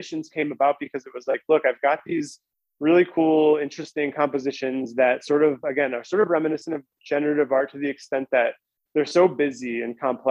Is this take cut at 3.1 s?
no; 0 cuts

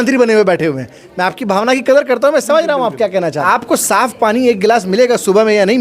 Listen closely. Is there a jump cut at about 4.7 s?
no; 1 cut; at 3.4 s

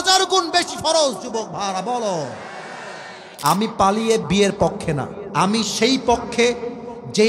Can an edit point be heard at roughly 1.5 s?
no; 2 cuts; at 3.3 s, 5.2 s

